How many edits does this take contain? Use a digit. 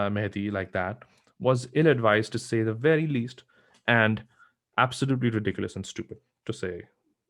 0